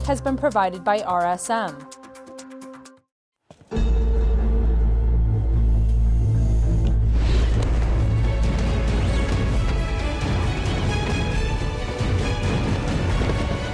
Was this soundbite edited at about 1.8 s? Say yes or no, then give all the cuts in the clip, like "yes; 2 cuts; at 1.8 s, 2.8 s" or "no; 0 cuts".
yes; 2 cuts; at 1.8 s, 2.9 s